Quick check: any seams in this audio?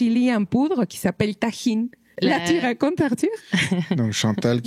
yes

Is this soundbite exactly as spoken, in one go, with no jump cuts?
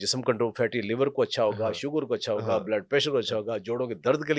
yes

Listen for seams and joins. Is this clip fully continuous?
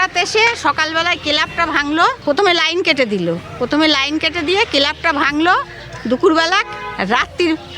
no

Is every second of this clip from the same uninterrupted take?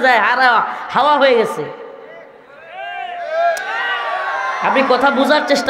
yes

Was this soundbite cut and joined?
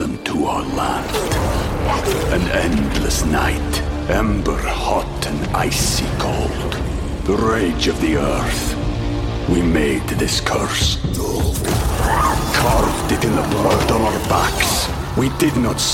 no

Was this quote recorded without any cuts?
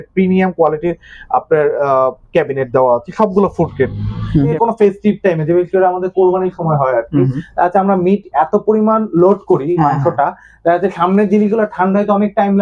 no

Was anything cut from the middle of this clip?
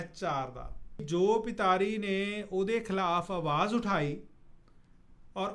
yes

